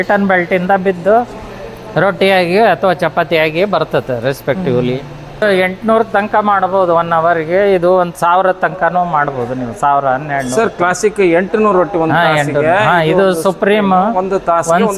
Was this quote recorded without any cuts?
no; 1 cut; at 5.4 s

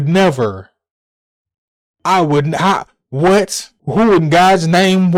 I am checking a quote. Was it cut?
no; 0 cuts

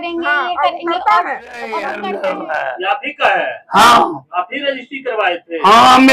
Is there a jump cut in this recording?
yes; 1 cut; at 1.9 s

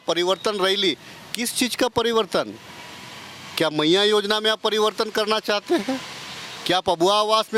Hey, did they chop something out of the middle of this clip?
no; 0 cuts

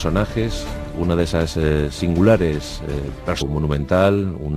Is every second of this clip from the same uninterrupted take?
yes; 0 cuts

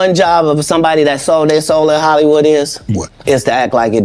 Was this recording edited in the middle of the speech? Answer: no; 0 cuts

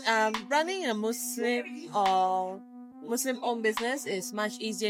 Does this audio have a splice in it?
no; 0 cuts

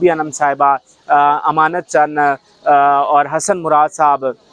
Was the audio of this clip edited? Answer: no; 0 cuts

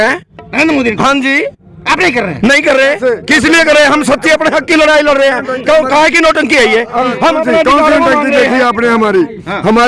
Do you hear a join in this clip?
no; 0 cuts

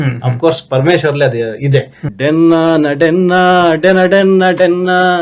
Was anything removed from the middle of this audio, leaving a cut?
yes; 1 cut; at 2.0 s

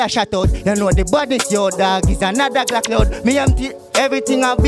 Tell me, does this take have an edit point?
no; 0 cuts

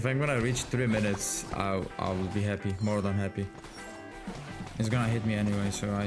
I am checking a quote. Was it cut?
yes; 1 cut; at 4.1 s

